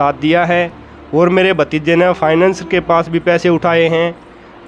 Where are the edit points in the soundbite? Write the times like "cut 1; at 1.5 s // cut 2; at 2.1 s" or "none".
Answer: none